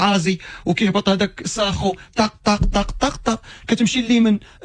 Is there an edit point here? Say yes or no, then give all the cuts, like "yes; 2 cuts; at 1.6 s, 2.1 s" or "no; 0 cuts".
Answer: no; 0 cuts